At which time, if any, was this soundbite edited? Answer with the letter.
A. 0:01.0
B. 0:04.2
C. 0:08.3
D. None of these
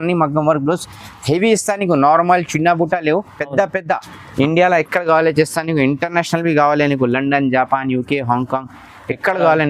B